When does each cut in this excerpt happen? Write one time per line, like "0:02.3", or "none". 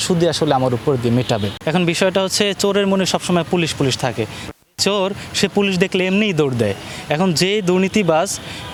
none